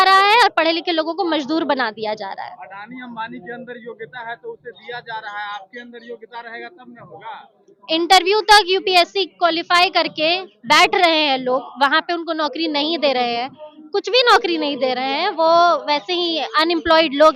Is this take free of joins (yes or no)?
yes